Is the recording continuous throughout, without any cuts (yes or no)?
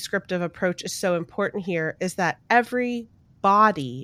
yes